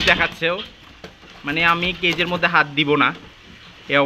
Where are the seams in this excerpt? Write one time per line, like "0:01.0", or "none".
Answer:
none